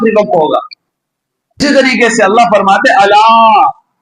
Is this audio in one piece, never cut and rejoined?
no; 1 cut; at 1.6 s

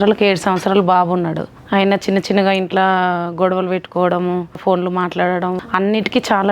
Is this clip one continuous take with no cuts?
no; 3 cuts; at 1.5 s, 4.6 s, 5.6 s

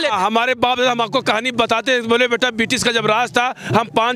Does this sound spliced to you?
no; 0 cuts

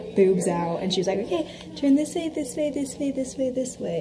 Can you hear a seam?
no; 0 cuts

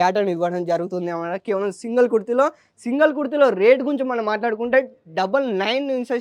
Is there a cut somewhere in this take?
no; 0 cuts

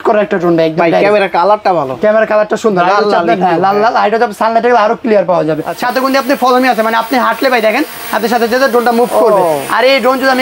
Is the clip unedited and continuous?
no; 1 cut; at 5.7 s

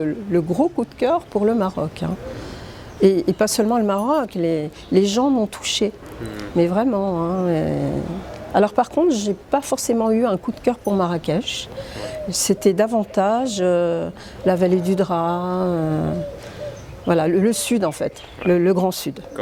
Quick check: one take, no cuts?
yes; 0 cuts

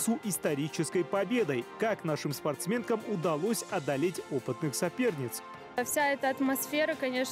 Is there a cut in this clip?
no; 0 cuts

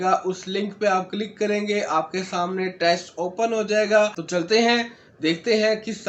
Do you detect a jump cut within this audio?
yes; 1 cut; at 4.2 s

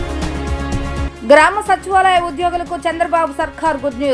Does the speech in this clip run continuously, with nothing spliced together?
no; 1 cut; at 1.0 s

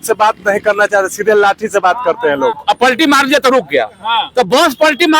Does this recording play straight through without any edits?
no; 1 cut; at 2.6 s

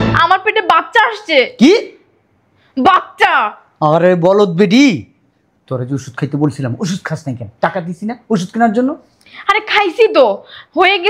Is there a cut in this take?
no; 0 cuts

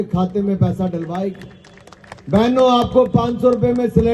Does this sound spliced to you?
no; 0 cuts

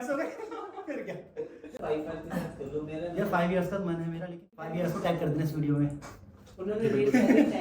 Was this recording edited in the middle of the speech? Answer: yes; 2 cuts; at 1.8 s, 4.6 s

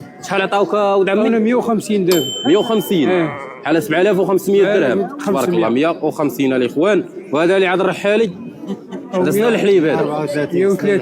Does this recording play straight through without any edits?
yes; 0 cuts

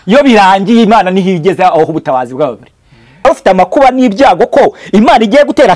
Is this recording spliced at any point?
yes; 1 cut; at 3.2 s

